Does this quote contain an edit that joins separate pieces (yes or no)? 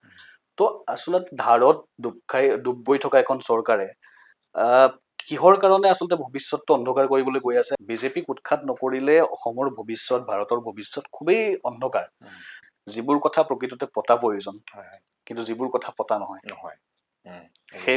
yes